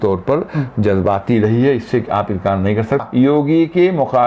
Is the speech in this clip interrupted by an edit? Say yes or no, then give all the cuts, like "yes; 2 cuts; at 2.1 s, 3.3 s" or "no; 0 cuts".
yes; 1 cut; at 3.0 s